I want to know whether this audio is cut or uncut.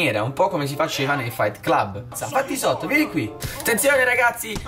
cut